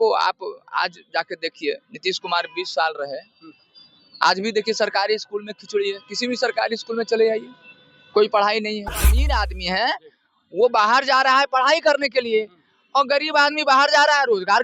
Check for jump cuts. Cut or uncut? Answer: cut